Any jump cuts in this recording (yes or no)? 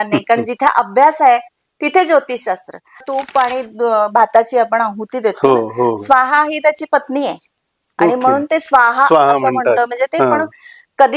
yes